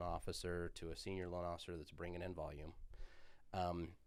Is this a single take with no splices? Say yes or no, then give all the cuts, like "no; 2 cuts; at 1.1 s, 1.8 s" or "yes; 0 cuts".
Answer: yes; 0 cuts